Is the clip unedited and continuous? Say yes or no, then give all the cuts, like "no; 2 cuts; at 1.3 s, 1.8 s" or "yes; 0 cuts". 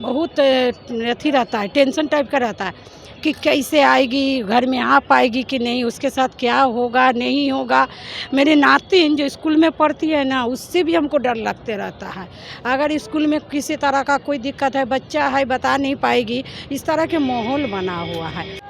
yes; 0 cuts